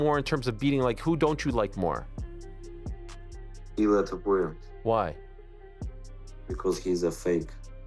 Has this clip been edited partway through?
yes; 2 cuts; at 2.1 s, 3.6 s

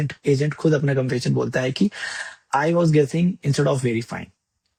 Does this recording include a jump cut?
no; 0 cuts

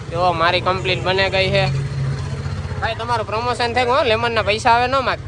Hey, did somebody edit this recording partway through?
no; 0 cuts

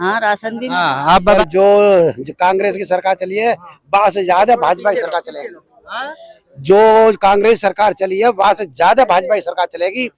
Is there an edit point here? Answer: yes; 1 cut; at 1.4 s

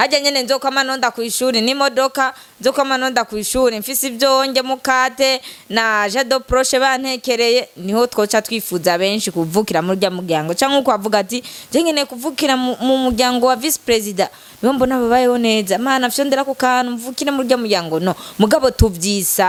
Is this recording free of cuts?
yes; 0 cuts

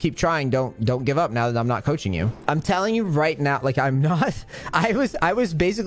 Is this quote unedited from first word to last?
no; 1 cut; at 2.3 s

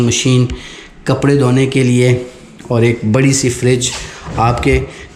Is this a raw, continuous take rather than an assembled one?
yes; 0 cuts

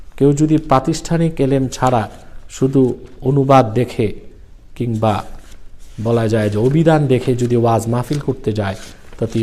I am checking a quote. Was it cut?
no; 0 cuts

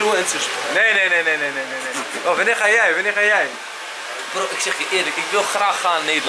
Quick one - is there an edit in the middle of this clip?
no; 0 cuts

